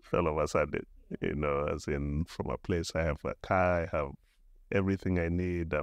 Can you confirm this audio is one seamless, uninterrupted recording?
yes; 0 cuts

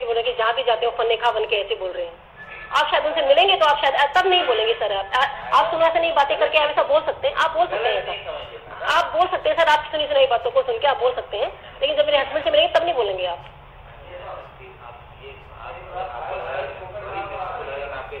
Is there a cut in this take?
no; 0 cuts

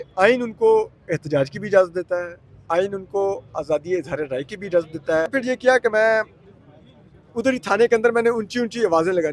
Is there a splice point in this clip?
yes; 1 cut; at 5.4 s

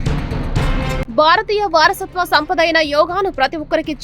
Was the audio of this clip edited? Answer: yes; 1 cut; at 1.0 s

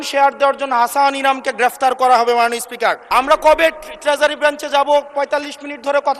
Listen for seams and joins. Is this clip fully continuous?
no; 1 cut; at 3.1 s

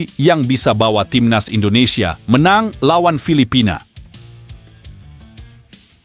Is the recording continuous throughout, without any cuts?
no; 1 cut; at 3.9 s

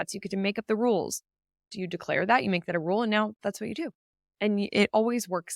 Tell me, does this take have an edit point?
yes; 1 cut; at 1.7 s

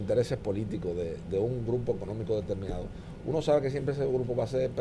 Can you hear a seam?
no; 0 cuts

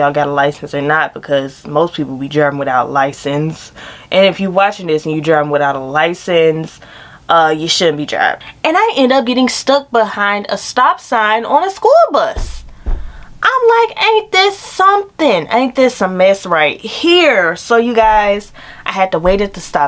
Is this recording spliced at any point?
yes; 1 cut; at 8.5 s

